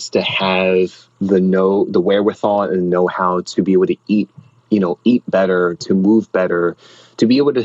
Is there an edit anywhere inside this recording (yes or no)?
no